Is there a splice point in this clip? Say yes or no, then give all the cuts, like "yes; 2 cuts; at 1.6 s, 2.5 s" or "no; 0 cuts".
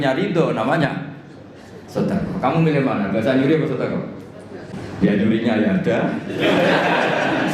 yes; 1 cut; at 4.6 s